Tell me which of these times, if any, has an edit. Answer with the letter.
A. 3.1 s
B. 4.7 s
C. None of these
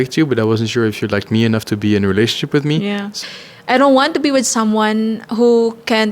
A